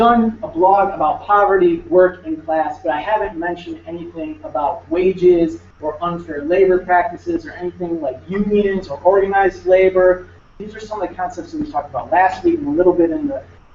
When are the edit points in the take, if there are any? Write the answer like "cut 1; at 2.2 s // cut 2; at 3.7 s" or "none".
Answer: cut 1; at 8.4 s